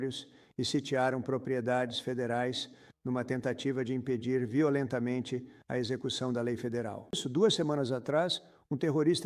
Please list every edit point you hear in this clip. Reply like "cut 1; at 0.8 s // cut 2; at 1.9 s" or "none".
cut 1; at 7.2 s

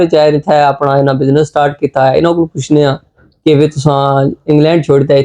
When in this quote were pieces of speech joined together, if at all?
none

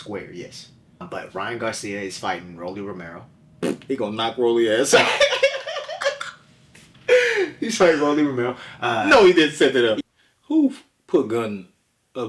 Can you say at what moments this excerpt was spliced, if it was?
cut 1; at 1.1 s // cut 2; at 10.0 s

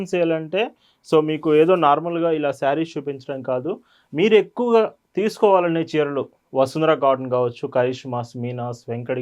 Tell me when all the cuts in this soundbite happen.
none

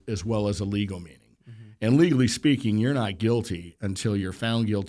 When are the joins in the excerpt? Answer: none

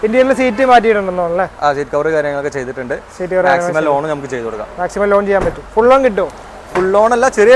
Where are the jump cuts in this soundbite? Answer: none

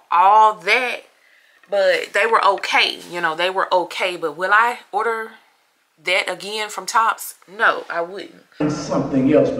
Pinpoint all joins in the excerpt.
cut 1; at 8.6 s

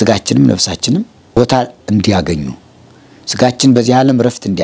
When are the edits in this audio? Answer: cut 1; at 1.3 s

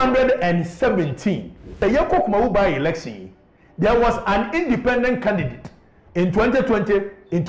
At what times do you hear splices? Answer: cut 1; at 1.8 s

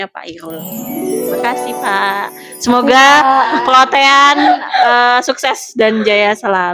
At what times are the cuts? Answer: none

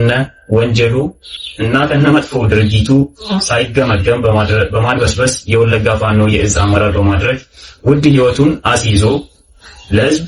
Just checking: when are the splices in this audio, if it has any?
none

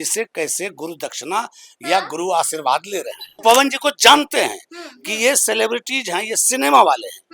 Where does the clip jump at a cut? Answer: cut 1; at 3.4 s

